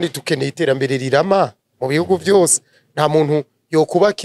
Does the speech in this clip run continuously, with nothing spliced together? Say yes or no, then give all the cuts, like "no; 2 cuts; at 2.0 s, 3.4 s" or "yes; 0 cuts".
yes; 0 cuts